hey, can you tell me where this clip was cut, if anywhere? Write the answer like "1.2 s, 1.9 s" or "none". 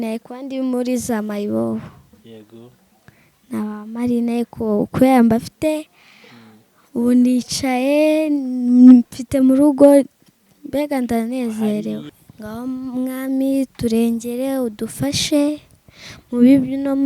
12.2 s